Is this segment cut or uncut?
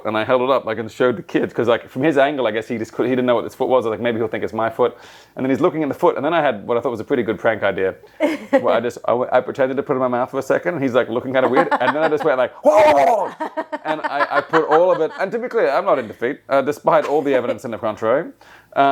uncut